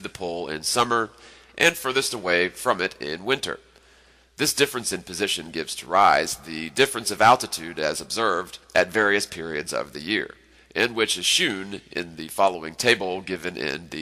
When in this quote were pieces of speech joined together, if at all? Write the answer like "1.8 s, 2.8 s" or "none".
none